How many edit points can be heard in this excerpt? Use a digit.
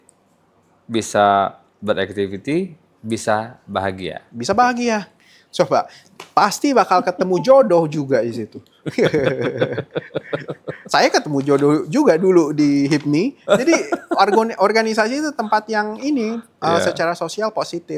0